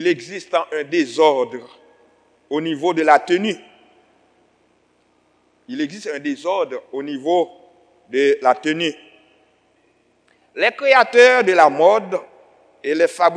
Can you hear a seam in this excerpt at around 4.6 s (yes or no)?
no